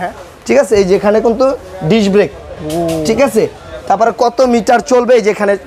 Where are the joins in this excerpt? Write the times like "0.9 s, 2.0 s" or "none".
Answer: none

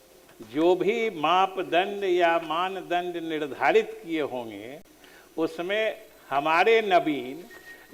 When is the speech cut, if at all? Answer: none

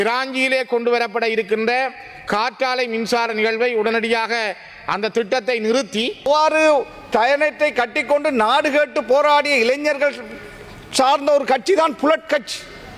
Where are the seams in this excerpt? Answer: 6.3 s

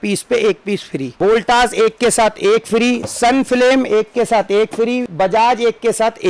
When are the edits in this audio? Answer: 1.1 s, 5.1 s

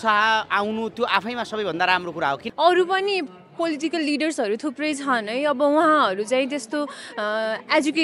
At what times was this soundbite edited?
2.5 s

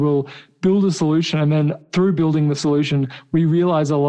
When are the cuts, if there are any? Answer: 1.8 s

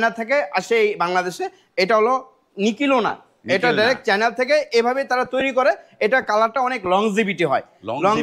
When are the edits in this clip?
none

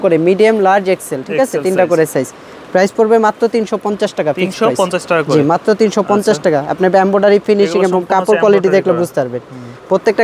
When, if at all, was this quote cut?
none

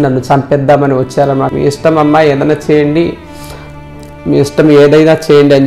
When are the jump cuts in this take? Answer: 1.5 s

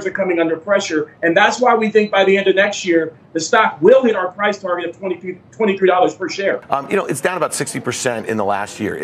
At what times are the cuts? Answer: 1.1 s, 6.6 s

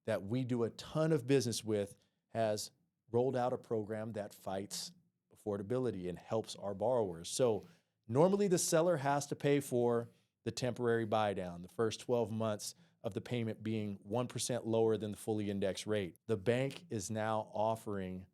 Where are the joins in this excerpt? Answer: 16.2 s

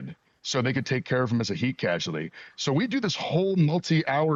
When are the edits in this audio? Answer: none

